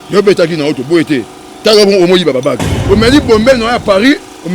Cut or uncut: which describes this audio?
cut